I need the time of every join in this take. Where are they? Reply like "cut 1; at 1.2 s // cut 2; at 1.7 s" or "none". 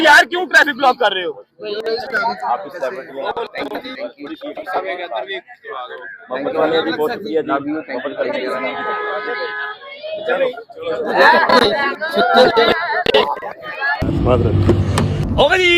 none